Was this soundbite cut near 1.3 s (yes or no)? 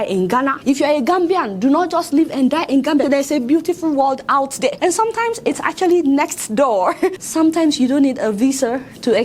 no